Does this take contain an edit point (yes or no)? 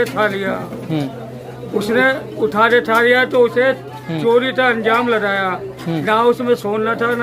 no